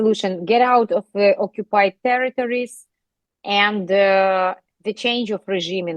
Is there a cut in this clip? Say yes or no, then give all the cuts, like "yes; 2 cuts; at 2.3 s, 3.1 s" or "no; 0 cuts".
no; 0 cuts